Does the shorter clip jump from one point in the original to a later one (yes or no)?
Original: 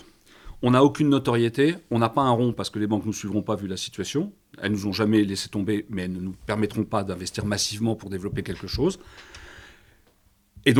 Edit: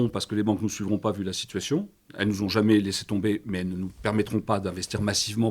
no